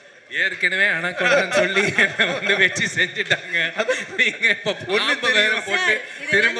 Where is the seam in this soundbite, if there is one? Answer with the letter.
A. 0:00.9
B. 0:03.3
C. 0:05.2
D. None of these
D